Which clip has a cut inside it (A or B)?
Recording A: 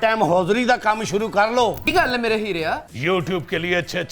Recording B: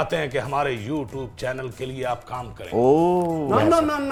A